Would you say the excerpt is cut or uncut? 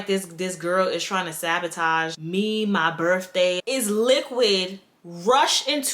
cut